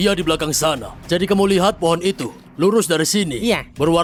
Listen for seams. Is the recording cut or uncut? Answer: uncut